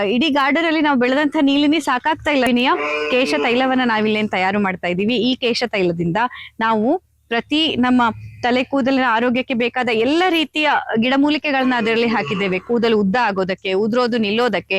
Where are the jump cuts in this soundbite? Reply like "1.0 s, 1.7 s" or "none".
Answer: 2.5 s